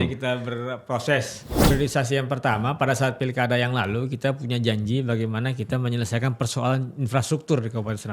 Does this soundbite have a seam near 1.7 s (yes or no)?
yes